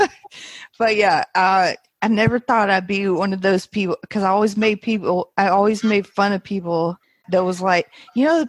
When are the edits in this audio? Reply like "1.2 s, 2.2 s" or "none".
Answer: 1.9 s, 7.2 s